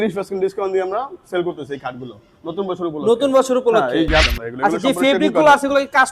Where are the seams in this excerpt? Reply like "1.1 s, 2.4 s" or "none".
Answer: 4.2 s